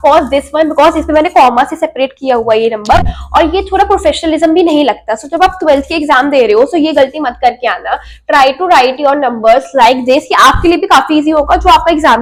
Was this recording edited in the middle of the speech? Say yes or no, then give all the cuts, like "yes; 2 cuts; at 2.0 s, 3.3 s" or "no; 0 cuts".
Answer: no; 0 cuts